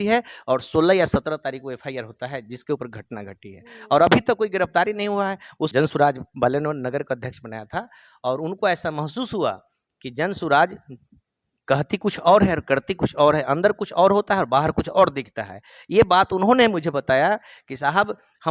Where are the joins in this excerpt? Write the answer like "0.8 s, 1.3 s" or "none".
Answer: 5.7 s